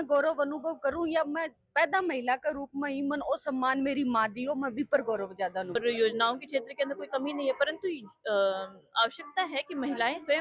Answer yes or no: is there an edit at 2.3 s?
no